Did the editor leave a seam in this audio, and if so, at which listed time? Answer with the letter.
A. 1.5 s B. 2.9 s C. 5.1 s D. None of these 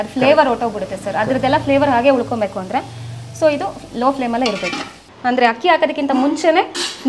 C